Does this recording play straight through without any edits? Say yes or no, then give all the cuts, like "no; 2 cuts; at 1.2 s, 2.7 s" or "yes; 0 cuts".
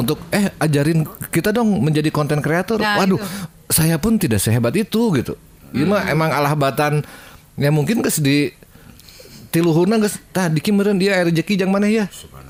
yes; 0 cuts